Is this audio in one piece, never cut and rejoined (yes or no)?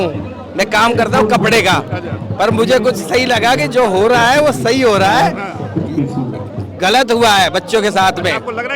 yes